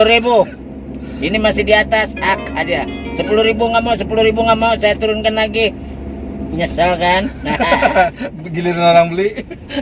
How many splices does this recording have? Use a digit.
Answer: 1